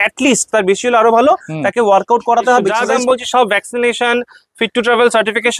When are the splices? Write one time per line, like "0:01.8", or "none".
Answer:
0:02.8